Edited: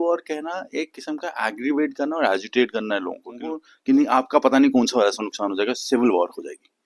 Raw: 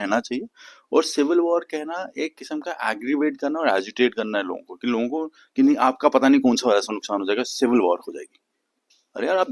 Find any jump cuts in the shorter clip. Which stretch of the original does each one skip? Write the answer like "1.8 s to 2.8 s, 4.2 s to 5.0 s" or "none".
4.8 s to 5.1 s

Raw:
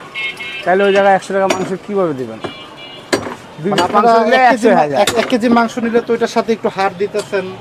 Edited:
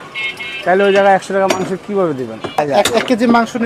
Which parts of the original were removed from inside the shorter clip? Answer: 2.6 s to 4.8 s

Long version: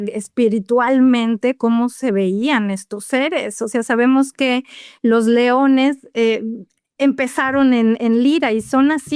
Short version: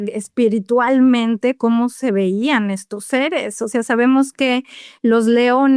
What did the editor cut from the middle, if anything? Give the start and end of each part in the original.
none

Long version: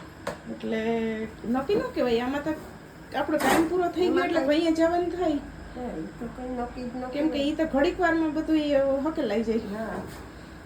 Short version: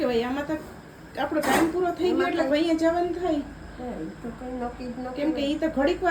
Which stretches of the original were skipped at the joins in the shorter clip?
none

